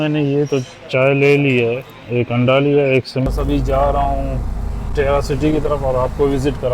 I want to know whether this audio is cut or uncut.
cut